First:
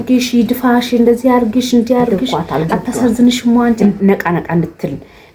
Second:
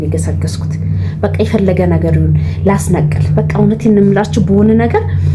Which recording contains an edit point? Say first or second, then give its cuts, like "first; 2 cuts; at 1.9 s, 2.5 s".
first; 1 cut; at 3.8 s